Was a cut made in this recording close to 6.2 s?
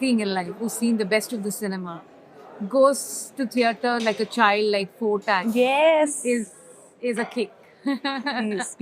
no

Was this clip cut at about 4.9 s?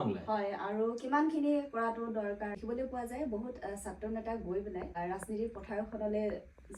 yes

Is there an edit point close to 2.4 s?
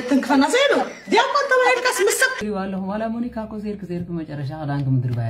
yes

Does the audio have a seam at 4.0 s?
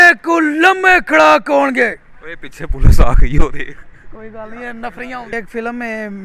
no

